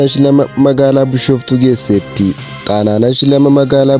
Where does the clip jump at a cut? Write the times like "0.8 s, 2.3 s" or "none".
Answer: none